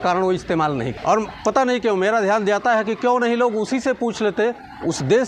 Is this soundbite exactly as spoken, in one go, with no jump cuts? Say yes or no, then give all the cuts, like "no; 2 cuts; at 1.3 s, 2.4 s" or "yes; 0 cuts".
no; 1 cut; at 0.9 s